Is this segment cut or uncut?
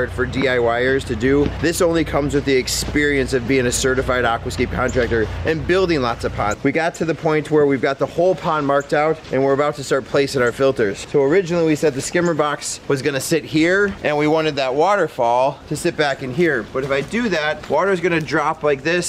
cut